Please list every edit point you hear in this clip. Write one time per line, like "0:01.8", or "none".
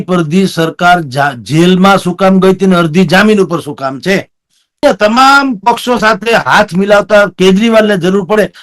0:04.8